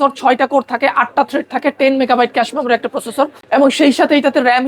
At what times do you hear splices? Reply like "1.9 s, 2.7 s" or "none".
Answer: 3.4 s